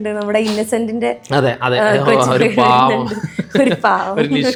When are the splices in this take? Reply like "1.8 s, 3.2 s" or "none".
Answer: none